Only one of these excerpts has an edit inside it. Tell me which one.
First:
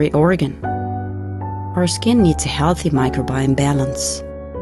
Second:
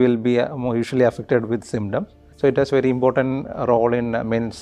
second; 1 cut; at 2.2 s

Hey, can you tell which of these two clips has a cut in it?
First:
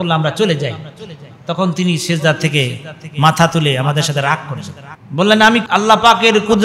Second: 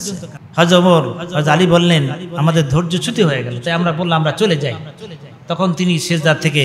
first; 1 cut; at 5.6 s

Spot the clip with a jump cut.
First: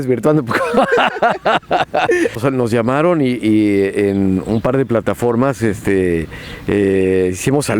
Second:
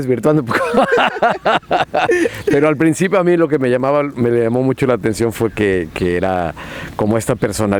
first; 1 cut; at 2.4 s

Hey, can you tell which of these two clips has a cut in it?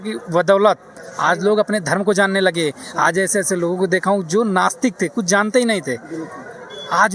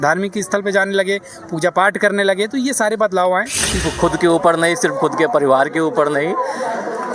second; 1 cut; at 3.9 s

